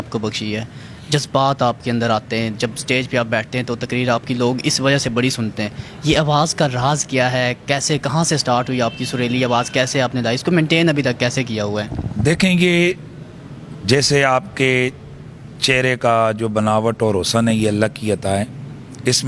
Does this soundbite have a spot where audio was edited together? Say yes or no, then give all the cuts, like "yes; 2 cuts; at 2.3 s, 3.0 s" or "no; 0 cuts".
no; 0 cuts